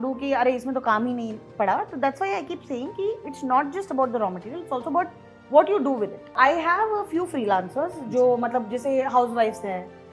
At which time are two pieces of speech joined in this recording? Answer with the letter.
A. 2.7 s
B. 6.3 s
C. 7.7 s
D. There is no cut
B